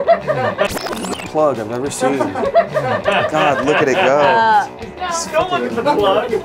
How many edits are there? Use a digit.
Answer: 0